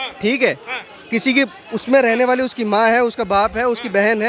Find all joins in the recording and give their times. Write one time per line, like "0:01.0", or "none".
none